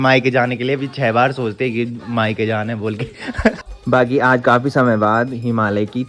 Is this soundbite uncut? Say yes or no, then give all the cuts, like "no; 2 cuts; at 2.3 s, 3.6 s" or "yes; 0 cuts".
no; 1 cut; at 3.6 s